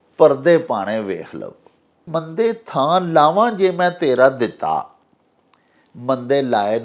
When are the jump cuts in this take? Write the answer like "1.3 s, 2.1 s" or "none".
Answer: 2.0 s